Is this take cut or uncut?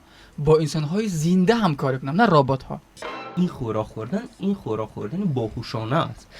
cut